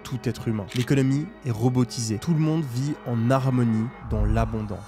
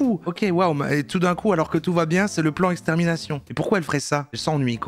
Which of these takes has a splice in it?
first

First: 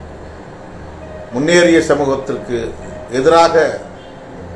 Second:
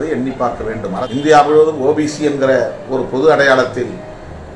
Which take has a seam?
second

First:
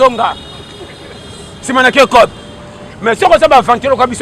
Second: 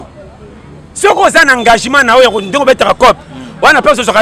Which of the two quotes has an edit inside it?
first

